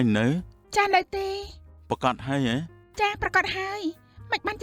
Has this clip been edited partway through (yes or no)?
no